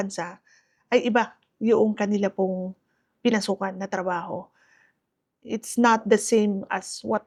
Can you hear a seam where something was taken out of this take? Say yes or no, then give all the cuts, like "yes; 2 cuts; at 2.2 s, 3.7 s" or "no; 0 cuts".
no; 0 cuts